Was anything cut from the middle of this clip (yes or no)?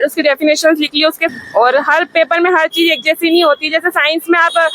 yes